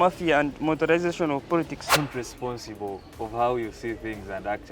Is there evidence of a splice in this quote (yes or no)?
yes